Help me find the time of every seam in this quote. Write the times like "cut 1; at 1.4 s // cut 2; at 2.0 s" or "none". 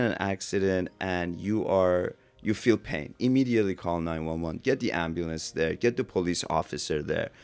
none